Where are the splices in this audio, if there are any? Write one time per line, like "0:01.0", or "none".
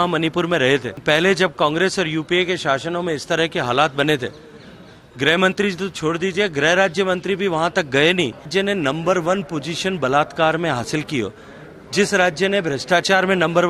0:01.0
0:08.5